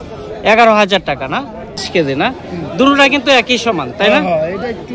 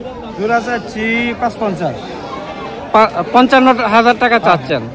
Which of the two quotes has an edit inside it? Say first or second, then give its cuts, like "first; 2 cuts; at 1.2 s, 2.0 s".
first; 1 cut; at 1.8 s